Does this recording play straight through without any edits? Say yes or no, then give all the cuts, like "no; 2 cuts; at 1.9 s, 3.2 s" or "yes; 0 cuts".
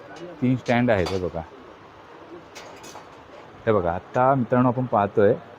yes; 0 cuts